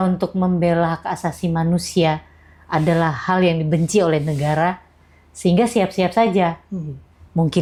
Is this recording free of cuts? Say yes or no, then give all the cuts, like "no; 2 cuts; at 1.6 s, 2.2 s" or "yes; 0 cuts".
yes; 0 cuts